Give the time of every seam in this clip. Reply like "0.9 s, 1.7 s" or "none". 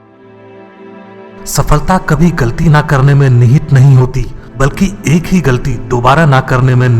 1.1 s